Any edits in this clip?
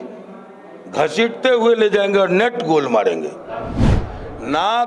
yes; 1 cut; at 3.8 s

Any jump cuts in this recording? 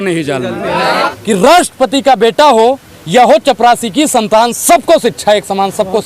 yes; 1 cut; at 0.9 s

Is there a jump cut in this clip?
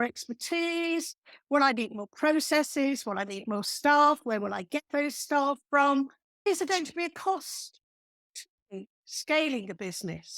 yes; 1 cut; at 6.5 s

